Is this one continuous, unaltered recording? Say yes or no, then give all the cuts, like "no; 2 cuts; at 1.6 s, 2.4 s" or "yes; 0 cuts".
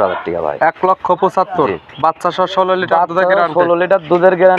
yes; 0 cuts